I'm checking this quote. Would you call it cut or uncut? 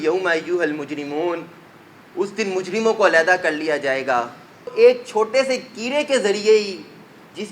cut